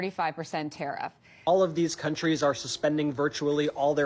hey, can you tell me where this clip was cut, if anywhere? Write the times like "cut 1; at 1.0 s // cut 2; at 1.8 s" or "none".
cut 1; at 1.4 s